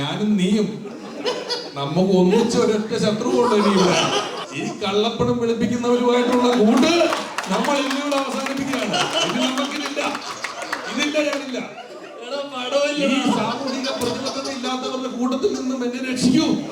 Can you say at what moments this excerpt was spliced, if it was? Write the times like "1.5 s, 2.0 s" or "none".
4.4 s